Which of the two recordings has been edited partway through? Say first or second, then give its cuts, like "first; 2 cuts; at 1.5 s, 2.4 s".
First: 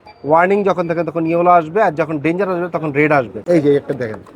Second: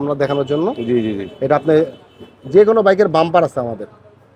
first; 1 cut; at 3.3 s